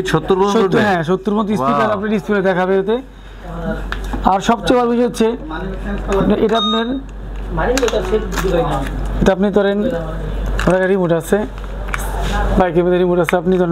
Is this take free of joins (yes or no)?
yes